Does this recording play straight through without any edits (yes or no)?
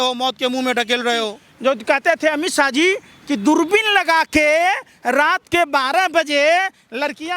no